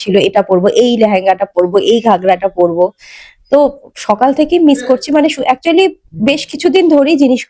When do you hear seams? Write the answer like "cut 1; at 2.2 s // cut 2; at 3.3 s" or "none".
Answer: none